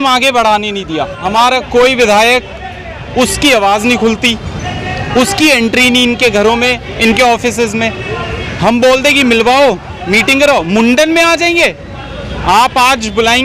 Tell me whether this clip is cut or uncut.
cut